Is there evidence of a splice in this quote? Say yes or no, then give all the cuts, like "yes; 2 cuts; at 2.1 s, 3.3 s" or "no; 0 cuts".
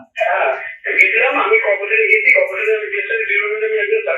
no; 0 cuts